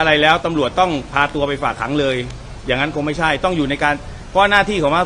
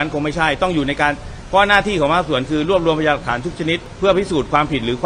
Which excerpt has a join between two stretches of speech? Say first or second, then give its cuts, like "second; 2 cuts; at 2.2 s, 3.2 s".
second; 1 cut; at 3.9 s